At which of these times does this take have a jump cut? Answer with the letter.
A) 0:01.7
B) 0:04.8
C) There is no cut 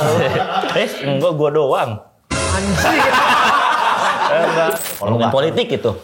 B